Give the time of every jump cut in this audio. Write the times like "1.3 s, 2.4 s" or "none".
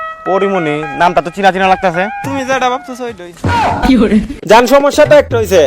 4.3 s